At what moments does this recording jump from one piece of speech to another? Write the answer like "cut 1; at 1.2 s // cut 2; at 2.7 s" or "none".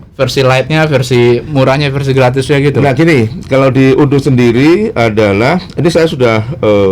none